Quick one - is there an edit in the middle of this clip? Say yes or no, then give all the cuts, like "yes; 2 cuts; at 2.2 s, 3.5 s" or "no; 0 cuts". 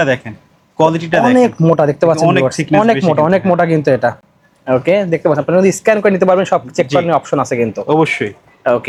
no; 0 cuts